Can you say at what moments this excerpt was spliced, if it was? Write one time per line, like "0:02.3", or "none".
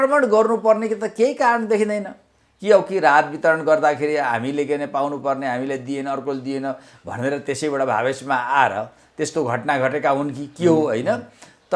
none